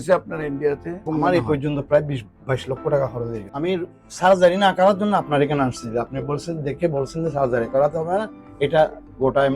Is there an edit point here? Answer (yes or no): yes